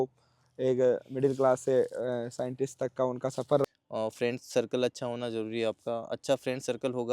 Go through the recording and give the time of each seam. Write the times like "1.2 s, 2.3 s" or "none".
3.7 s